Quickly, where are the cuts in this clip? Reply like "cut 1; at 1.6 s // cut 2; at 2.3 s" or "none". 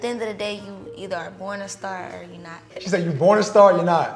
cut 1; at 2.8 s